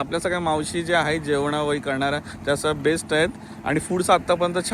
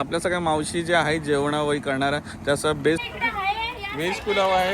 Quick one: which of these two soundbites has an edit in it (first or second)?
second